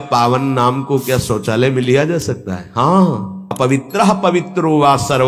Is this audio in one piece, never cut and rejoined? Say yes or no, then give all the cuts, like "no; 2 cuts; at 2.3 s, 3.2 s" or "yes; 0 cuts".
no; 1 cut; at 3.4 s